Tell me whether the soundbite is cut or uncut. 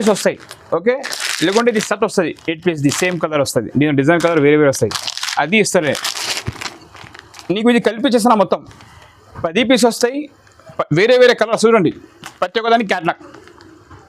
uncut